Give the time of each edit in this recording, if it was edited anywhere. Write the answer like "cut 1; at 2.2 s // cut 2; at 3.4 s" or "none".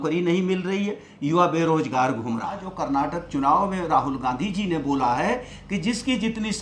cut 1; at 2.7 s